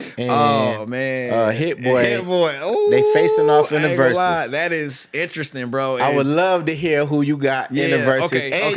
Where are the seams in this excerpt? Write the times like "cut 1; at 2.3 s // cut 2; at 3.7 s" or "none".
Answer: none